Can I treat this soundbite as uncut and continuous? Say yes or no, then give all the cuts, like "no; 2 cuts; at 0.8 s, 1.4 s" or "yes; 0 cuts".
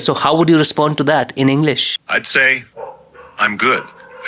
no; 1 cut; at 2.0 s